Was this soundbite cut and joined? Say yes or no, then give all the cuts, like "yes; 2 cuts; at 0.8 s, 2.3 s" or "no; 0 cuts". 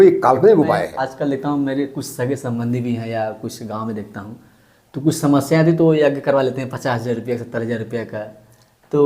yes; 1 cut; at 1.0 s